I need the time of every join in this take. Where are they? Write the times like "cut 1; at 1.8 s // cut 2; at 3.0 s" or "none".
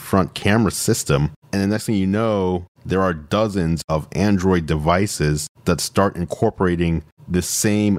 cut 1; at 1.4 s // cut 2; at 3.8 s